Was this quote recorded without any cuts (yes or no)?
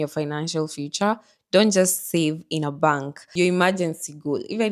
no